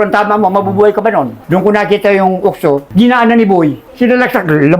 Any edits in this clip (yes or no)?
yes